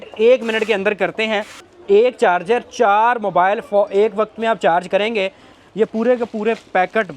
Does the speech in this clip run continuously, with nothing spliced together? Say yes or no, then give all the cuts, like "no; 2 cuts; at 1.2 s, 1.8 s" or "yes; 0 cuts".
no; 2 cuts; at 1.6 s, 5.5 s